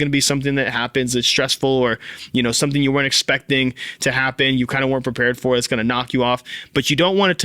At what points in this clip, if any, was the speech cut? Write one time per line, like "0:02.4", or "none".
none